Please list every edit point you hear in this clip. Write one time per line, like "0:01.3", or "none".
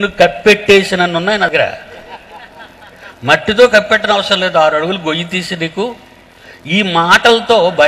0:01.5